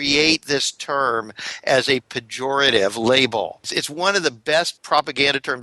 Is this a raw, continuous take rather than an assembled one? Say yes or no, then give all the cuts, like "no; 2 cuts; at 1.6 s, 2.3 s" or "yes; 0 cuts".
no; 2 cuts; at 3.8 s, 4.8 s